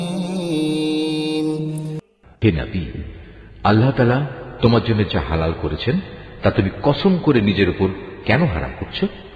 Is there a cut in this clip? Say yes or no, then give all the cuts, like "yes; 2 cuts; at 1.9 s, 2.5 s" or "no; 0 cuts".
yes; 1 cut; at 1.9 s